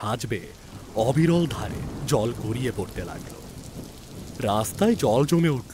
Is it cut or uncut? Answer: cut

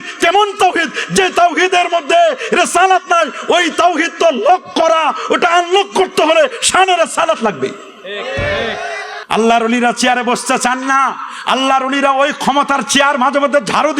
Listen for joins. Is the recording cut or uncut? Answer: cut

